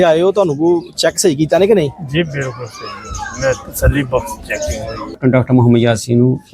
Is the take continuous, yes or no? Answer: no